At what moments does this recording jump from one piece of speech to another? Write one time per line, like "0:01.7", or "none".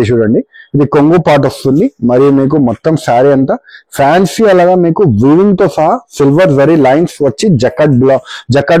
none

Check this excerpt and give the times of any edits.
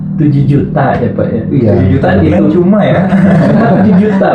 none

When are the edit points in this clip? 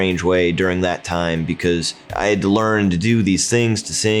0:02.0

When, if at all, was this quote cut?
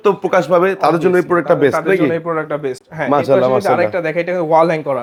none

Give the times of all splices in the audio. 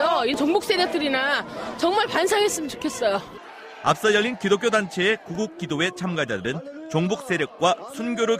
none

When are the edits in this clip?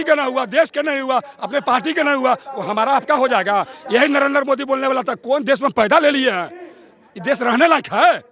none

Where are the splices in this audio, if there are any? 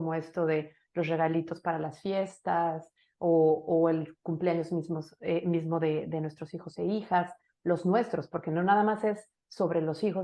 none

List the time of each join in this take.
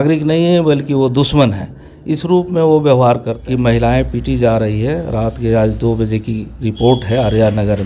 0:03.3

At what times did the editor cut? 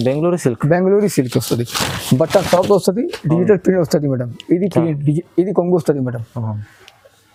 none

